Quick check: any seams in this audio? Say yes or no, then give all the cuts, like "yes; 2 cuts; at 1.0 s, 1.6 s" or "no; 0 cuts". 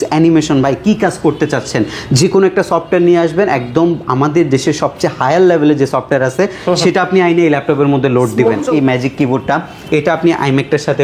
yes; 1 cut; at 8.6 s